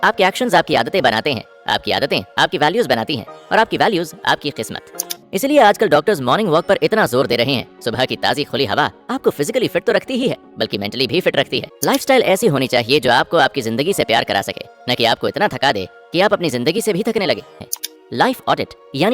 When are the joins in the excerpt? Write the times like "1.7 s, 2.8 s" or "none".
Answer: 5.1 s, 11.7 s, 17.7 s